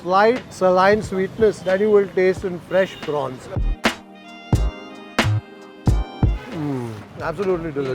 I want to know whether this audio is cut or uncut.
cut